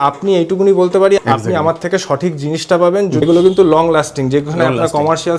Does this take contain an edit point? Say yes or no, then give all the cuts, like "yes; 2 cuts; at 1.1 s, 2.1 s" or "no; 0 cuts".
yes; 2 cuts; at 1.2 s, 3.2 s